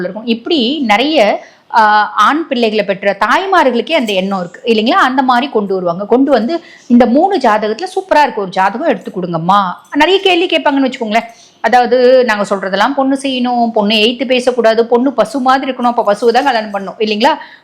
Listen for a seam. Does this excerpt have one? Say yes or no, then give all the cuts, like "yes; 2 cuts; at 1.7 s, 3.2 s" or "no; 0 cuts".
no; 0 cuts